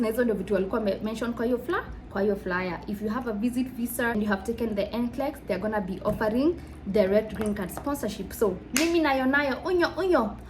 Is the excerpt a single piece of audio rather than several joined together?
no; 1 cut; at 4.1 s

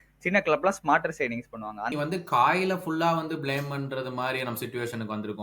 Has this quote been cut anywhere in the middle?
yes; 1 cut; at 1.9 s

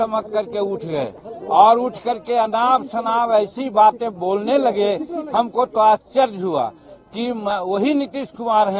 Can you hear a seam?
no; 0 cuts

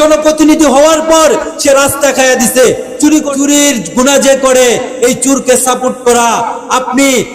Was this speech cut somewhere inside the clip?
yes; 1 cut; at 3.3 s

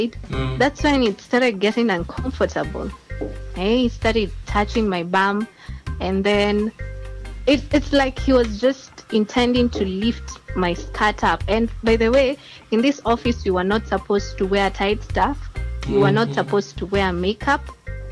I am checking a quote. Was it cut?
no; 0 cuts

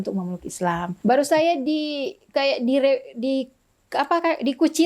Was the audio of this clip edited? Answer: yes; 1 cut; at 0.9 s

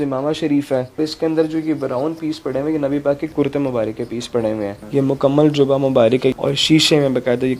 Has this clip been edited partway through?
yes; 4 cuts; at 1.0 s, 3.3 s, 4.8 s, 6.4 s

